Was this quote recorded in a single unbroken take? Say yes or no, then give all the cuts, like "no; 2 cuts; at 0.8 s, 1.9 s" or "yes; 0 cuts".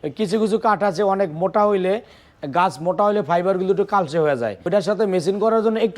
no; 1 cut; at 4.6 s